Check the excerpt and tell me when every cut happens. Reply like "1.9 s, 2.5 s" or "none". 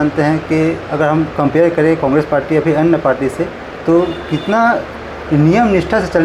none